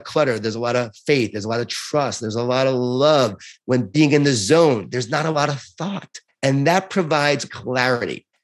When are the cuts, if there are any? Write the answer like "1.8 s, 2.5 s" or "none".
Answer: 3.5 s, 7.5 s